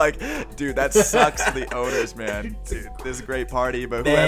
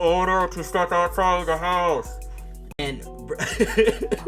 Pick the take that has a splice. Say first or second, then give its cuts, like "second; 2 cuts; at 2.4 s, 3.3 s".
second; 1 cut; at 2.8 s